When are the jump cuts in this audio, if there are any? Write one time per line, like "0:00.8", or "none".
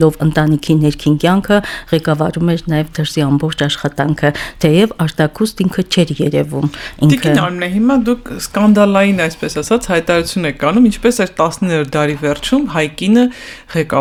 none